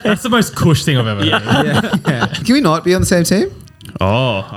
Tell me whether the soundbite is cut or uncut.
cut